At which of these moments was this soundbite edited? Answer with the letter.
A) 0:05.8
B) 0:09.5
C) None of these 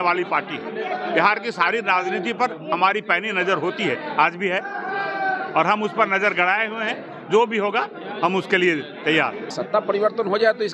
B